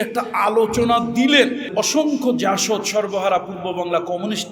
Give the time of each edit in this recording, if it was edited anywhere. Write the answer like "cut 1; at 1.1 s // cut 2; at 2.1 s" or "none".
cut 1; at 1.7 s